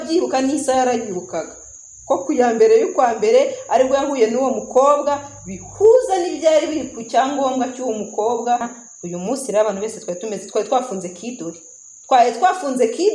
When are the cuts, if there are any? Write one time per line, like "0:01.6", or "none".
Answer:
0:08.7